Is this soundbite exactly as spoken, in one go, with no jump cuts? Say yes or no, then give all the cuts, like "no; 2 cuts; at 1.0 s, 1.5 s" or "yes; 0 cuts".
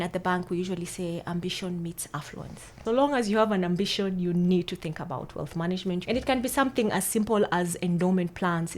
no; 2 cuts; at 2.8 s, 6.0 s